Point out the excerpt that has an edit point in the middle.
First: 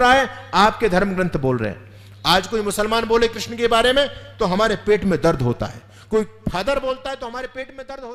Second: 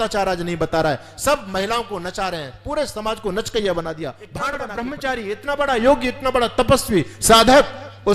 second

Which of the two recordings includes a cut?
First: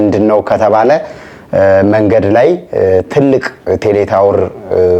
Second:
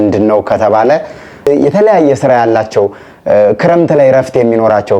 second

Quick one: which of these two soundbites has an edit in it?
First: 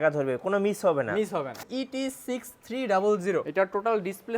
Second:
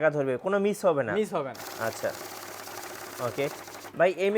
first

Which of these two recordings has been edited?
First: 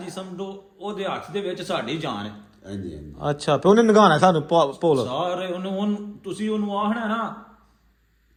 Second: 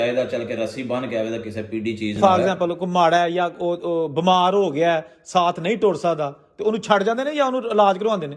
second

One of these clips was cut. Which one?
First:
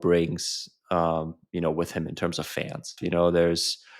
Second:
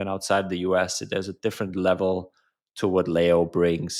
first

